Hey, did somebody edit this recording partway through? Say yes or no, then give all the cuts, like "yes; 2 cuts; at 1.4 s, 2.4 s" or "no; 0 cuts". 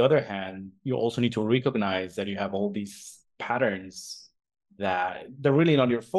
no; 0 cuts